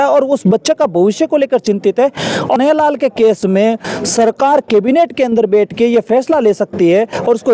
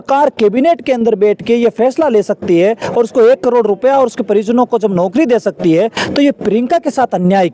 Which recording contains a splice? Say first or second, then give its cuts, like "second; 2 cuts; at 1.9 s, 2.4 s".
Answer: first; 1 cut; at 2.6 s